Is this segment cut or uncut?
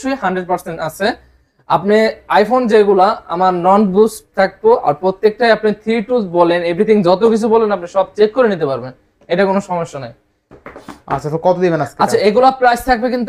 uncut